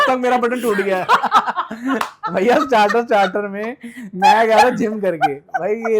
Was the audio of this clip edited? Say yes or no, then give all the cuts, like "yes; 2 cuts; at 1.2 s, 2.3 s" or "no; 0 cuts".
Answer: no; 0 cuts